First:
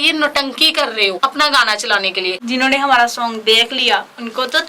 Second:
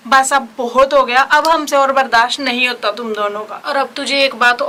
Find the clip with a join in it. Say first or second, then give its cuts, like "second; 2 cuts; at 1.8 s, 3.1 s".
first; 2 cuts; at 1.2 s, 2.4 s